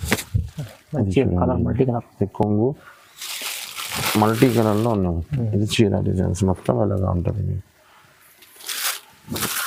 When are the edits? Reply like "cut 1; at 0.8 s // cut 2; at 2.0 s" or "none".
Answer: none